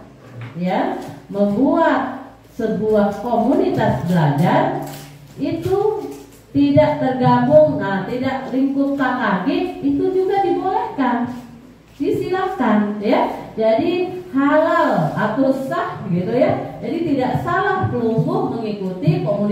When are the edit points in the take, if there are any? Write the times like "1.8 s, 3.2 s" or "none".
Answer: none